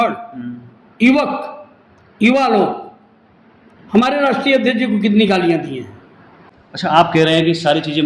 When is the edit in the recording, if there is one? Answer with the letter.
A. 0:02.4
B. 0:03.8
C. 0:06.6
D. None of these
C